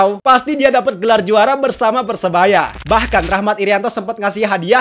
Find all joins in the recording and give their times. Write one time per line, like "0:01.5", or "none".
0:02.8